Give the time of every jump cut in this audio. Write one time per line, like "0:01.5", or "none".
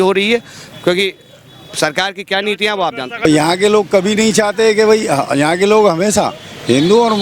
0:03.3